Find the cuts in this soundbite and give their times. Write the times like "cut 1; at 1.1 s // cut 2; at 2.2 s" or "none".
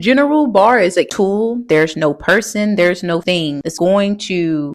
cut 1; at 1.1 s